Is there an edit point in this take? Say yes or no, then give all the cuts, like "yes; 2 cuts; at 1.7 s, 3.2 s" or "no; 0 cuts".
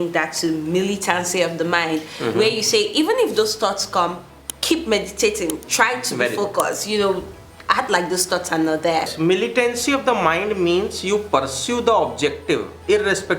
yes; 1 cut; at 9.1 s